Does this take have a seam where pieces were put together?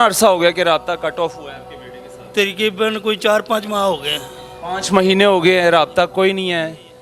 no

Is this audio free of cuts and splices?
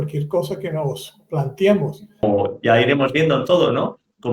no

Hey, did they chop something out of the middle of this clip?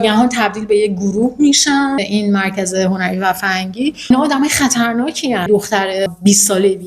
yes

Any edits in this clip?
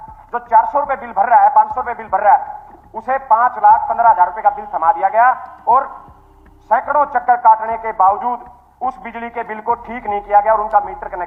no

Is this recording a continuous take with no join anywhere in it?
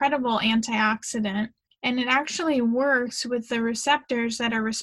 no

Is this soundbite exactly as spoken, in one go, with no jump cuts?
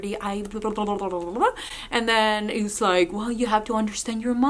yes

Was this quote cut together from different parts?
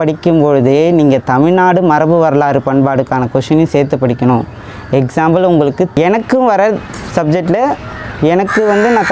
yes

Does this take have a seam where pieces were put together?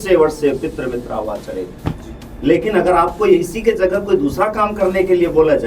yes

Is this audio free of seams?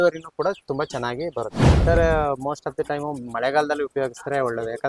no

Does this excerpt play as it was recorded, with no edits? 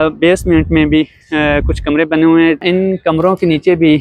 no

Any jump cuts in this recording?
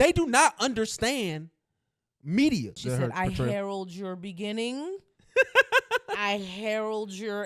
yes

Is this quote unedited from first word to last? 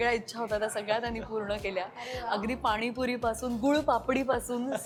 yes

